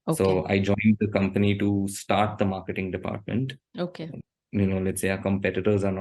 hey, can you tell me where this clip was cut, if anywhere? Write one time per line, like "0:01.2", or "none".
0:04.1